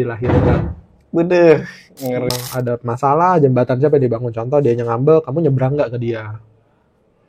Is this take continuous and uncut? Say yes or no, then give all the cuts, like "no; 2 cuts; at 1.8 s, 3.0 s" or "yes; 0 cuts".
no; 1 cut; at 2.3 s